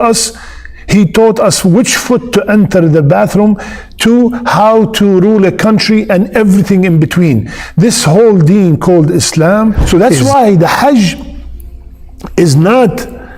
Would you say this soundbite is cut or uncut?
cut